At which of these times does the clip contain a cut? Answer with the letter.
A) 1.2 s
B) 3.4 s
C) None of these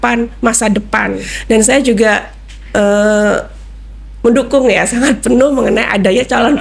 A